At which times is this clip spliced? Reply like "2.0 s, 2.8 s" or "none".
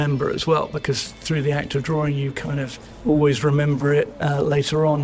2.8 s, 4.2 s